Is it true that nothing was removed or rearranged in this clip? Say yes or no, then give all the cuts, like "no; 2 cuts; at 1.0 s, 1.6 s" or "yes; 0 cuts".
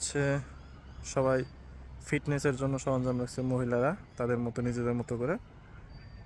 yes; 0 cuts